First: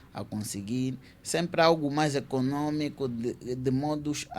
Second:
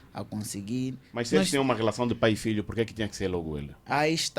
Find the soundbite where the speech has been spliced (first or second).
second